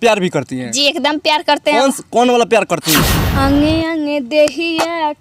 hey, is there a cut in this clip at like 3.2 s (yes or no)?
yes